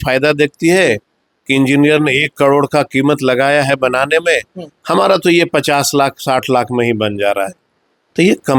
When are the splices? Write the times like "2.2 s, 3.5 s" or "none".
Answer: none